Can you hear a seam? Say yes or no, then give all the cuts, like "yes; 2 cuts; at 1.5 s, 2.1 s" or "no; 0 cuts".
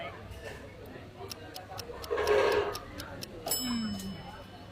no; 0 cuts